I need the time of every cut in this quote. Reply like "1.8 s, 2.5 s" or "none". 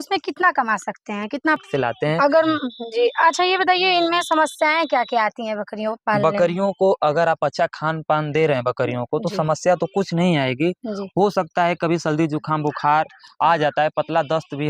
1.6 s